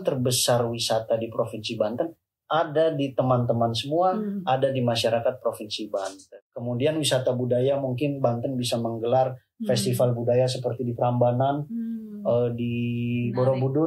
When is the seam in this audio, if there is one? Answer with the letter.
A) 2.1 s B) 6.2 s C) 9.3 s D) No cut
B